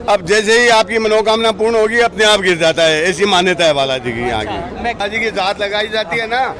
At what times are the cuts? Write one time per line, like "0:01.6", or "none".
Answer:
0:05.0